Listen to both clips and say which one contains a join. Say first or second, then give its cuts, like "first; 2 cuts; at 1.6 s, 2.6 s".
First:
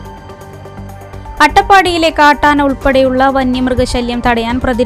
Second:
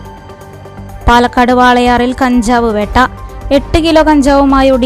second; 1 cut; at 1.0 s